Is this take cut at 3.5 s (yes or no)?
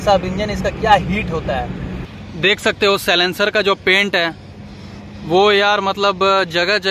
no